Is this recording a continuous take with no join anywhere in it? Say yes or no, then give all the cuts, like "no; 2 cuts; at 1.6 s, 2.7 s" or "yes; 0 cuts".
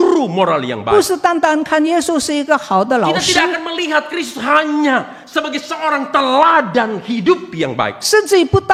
yes; 0 cuts